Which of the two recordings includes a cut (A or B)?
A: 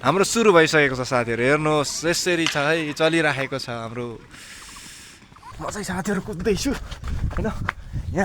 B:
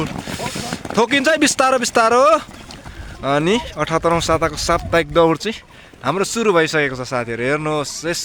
A